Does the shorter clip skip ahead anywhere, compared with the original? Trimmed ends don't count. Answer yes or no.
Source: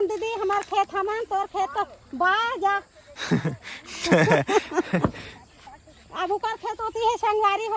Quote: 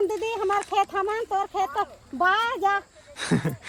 no